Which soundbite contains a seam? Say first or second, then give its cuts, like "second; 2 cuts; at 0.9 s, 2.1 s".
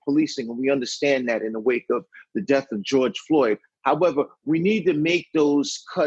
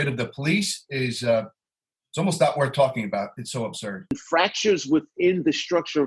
second; 1 cut; at 4.2 s